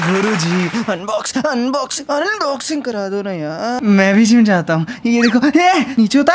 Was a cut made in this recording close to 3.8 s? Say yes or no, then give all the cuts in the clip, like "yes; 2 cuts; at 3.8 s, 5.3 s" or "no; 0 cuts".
yes; 1 cut; at 3.8 s